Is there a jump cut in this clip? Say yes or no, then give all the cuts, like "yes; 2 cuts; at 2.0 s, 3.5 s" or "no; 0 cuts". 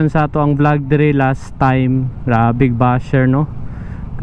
no; 0 cuts